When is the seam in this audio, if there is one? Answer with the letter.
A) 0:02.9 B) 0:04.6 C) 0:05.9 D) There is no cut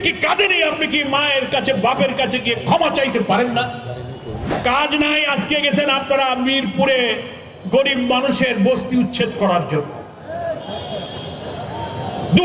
B